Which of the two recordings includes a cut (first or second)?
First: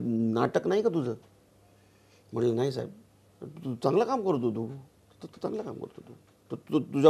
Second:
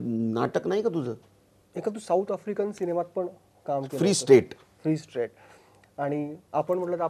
second